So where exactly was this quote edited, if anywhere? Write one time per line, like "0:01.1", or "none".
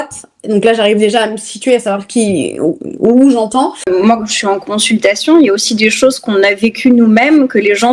0:03.9